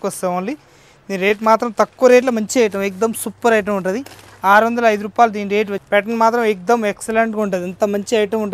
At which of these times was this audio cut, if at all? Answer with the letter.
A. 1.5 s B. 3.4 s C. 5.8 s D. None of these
C